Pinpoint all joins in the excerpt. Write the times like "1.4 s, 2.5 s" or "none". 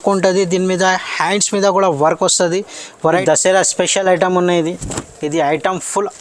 3.0 s